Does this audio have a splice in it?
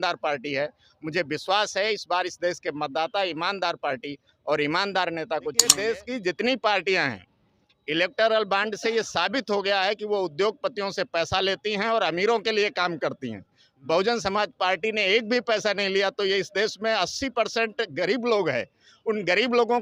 yes; 1 cut; at 5.7 s

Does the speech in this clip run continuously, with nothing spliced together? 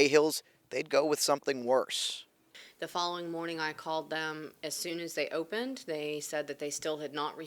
yes; 0 cuts

